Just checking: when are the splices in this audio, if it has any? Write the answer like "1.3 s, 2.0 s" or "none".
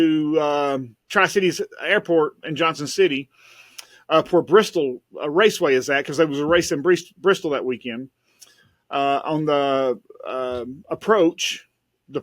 1.0 s